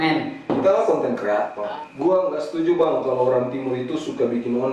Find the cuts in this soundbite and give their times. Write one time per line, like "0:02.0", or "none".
0:01.6